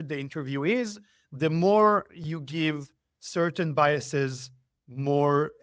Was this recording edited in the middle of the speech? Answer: no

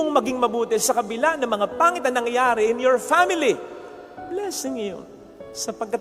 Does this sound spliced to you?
no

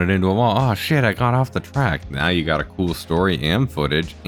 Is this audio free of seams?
yes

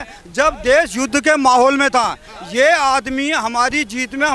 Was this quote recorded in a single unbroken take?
yes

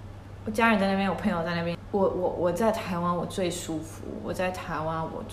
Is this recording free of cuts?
no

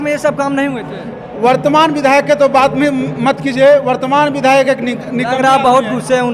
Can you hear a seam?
no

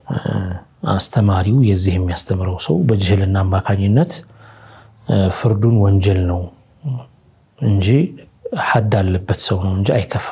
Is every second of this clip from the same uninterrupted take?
yes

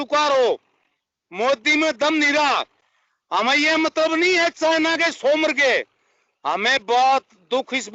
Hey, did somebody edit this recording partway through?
no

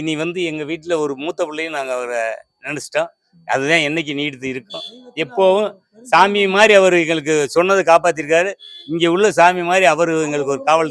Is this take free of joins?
yes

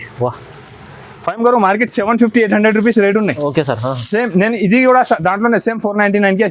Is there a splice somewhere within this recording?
no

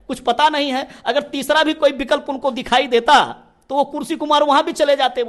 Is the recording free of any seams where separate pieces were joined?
yes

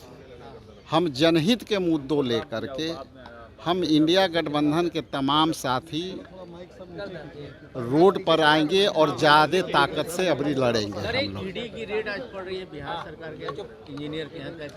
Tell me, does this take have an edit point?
no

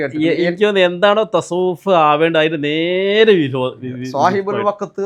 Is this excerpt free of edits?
yes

